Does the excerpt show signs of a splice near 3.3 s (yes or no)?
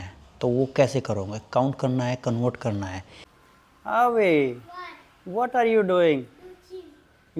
yes